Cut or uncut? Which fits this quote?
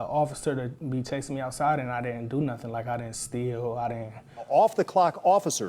cut